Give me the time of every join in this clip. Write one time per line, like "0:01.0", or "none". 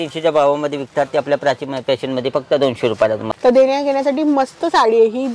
0:03.2